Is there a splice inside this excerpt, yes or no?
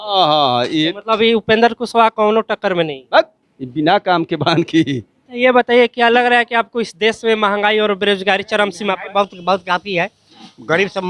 yes